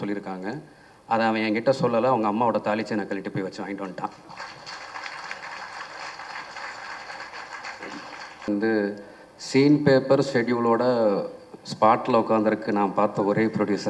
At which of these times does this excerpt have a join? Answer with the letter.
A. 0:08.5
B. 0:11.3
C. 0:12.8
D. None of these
A